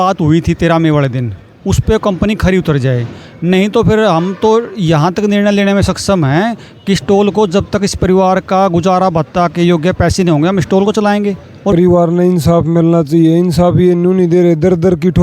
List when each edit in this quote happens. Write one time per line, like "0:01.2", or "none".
0:11.7